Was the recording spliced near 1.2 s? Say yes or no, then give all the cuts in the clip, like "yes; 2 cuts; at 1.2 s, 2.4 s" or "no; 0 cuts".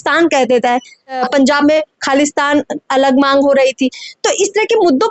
yes; 1 cut; at 1.2 s